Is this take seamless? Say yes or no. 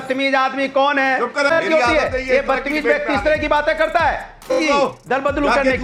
no